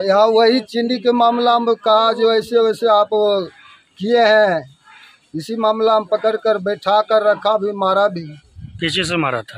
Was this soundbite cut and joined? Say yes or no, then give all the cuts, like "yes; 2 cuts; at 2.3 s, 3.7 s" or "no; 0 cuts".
no; 0 cuts